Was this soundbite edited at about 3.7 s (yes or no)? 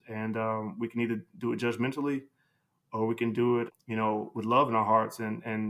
yes